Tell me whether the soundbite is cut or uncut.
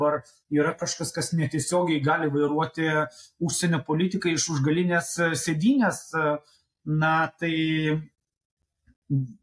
uncut